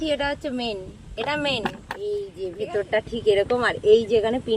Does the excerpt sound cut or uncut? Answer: cut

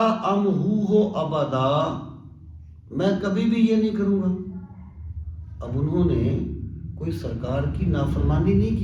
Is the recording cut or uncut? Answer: uncut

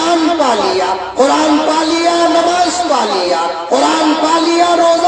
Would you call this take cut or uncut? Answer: uncut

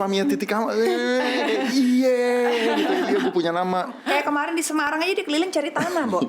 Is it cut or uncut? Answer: cut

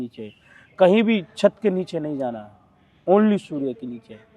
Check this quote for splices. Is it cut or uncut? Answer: uncut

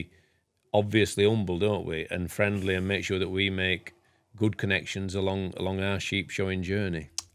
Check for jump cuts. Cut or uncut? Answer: uncut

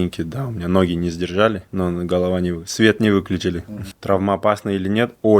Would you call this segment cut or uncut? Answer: cut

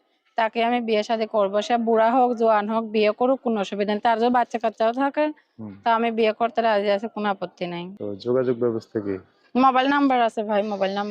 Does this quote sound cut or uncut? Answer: cut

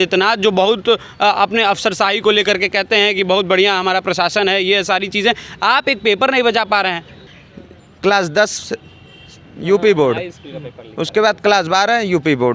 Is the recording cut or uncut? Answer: cut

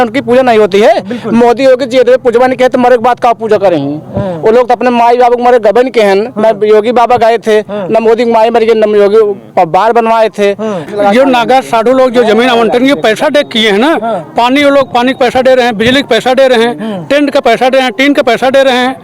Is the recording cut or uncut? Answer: cut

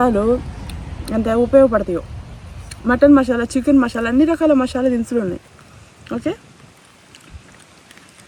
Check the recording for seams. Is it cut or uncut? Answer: uncut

